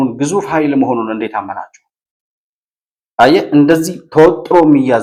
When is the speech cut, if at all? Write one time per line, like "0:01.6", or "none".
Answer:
none